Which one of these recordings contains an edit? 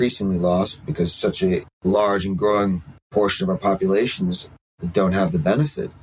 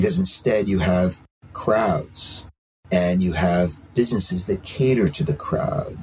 first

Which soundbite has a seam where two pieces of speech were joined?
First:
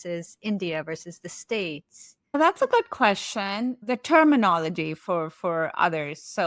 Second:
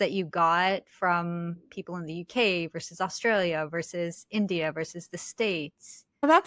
first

